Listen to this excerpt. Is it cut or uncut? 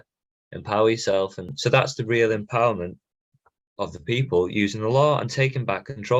cut